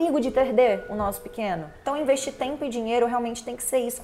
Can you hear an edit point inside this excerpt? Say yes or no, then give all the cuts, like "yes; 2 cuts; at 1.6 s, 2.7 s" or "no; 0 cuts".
yes; 1 cut; at 1.8 s